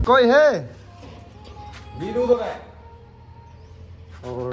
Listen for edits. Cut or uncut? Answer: uncut